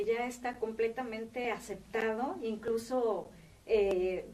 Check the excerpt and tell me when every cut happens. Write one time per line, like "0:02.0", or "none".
0:01.7